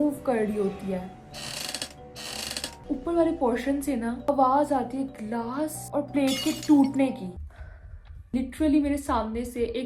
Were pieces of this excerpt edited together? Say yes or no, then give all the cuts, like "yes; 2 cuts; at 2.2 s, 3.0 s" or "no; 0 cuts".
yes; 3 cuts; at 2.8 s, 4.2 s, 7.3 s